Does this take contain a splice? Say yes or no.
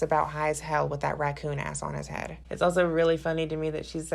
yes